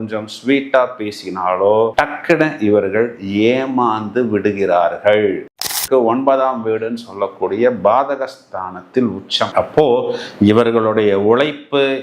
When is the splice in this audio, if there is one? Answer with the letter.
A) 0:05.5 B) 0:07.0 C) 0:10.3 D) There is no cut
A